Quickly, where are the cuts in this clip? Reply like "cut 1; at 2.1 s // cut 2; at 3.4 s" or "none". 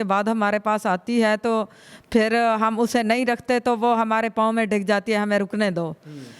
none